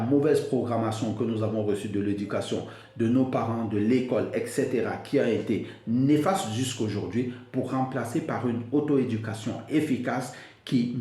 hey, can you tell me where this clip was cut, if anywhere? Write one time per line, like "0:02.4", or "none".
none